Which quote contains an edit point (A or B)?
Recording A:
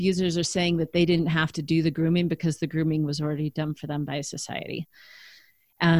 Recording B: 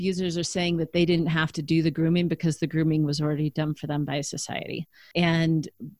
B